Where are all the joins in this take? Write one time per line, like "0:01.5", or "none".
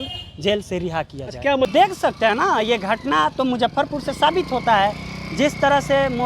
0:01.7